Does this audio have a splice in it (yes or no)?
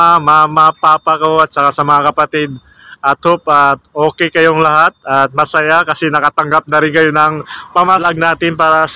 yes